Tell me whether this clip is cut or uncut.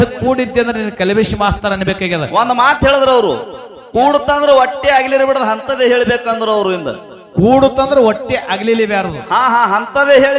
uncut